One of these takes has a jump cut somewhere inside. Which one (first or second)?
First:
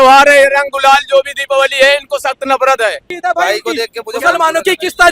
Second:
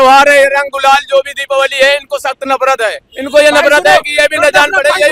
first